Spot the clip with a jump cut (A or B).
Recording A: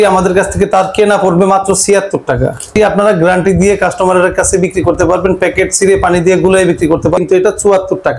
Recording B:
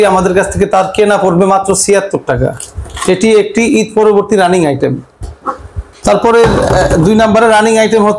A